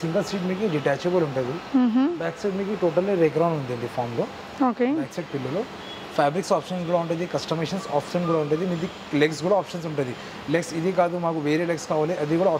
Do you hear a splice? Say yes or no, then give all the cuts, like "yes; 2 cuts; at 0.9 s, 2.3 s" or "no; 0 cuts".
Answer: no; 0 cuts